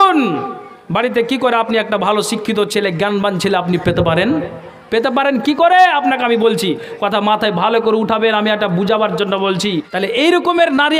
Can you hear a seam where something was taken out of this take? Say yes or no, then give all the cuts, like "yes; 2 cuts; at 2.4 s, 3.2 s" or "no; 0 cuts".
yes; 1 cut; at 9.9 s